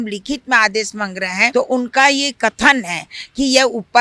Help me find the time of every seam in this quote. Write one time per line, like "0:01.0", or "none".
0:01.5